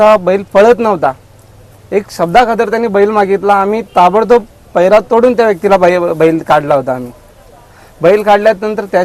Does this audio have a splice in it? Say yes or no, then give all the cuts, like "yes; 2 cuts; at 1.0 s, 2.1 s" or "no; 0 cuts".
no; 0 cuts